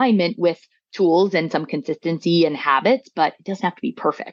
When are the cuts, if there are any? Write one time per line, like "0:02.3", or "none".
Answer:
none